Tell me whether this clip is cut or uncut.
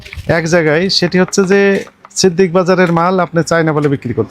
uncut